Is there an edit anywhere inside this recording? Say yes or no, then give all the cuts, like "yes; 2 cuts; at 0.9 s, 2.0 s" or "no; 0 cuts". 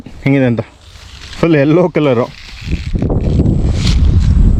no; 0 cuts